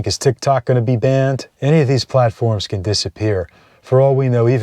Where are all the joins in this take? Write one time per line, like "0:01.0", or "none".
0:01.5